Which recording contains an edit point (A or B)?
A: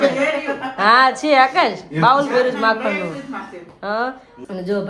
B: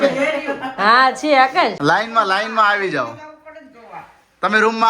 B